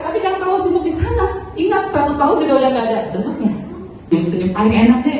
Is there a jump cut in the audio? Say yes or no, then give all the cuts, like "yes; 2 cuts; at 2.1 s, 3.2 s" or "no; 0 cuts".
yes; 1 cut; at 4.1 s